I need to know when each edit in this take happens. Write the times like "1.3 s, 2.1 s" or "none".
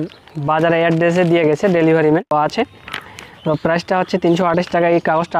2.3 s